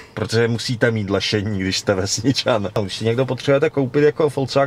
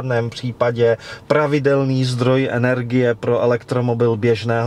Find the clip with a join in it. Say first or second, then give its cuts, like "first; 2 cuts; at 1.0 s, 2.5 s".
first; 1 cut; at 2.8 s